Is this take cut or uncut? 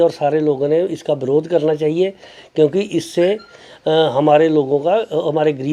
uncut